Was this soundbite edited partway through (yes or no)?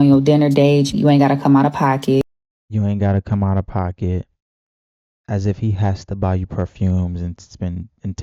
no